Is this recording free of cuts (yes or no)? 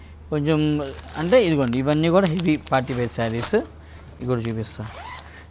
yes